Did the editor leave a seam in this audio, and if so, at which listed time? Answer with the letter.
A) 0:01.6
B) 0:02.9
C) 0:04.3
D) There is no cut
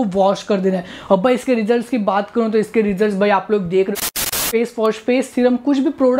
C